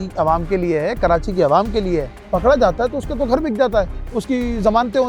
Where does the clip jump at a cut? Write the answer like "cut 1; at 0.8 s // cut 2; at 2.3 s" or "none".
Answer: cut 1; at 2.2 s